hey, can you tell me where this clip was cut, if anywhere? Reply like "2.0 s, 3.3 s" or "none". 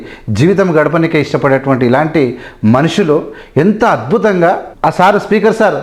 4.7 s